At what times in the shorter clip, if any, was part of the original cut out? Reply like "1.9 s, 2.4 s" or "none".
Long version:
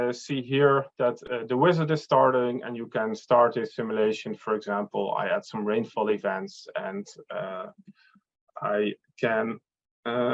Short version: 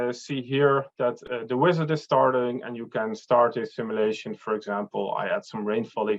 none